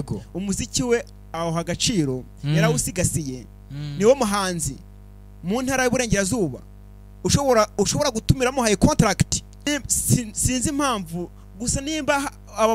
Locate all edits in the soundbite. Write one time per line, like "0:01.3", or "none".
0:09.7